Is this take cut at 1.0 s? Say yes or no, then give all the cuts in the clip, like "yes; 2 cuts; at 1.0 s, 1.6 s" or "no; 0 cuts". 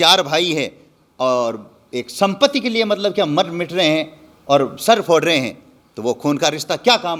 no; 0 cuts